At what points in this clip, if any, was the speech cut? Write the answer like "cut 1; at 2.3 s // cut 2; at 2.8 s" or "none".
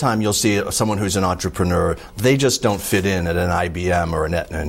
none